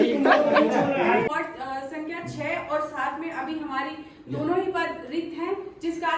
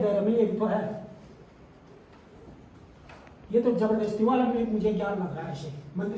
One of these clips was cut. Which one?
first; 1 cut; at 1.2 s

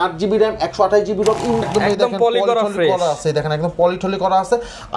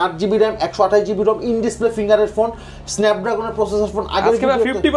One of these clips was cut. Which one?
first; 1 cut; at 1.7 s

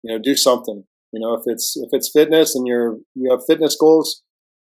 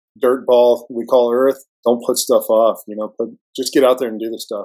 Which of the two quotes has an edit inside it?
second; 2 cuts; at 1.7 s, 3.4 s

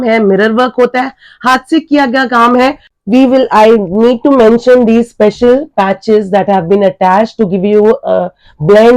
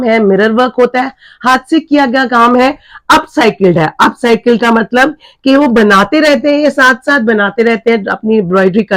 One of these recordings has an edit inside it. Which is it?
first; 1 cut; at 2.9 s

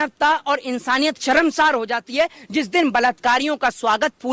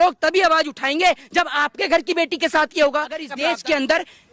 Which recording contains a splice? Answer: second; 1 cut; at 3.3 s

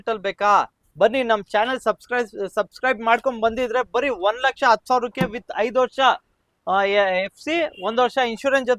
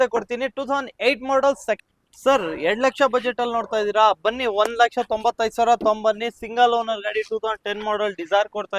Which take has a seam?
second; 1 cut; at 1.8 s

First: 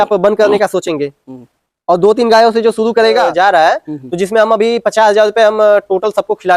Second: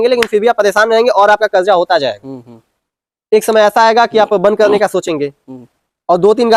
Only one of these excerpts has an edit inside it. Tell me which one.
first; 1 cut; at 3.3 s

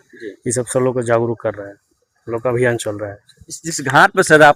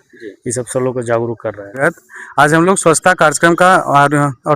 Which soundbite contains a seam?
second; 1 cut; at 1.8 s

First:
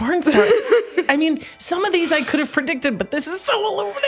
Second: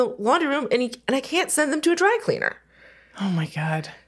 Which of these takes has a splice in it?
first; 1 cut; at 1.1 s

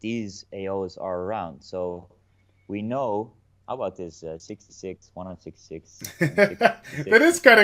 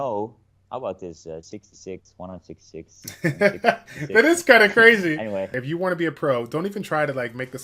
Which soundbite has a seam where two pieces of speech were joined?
second; 1 cut; at 5.6 s

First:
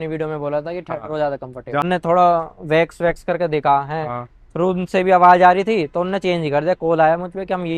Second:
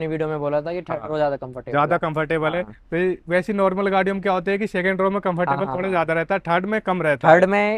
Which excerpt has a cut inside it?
first; 1 cut; at 1.8 s

